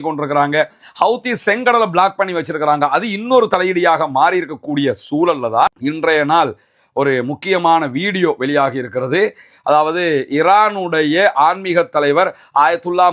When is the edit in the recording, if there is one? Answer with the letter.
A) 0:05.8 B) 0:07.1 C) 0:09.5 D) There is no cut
A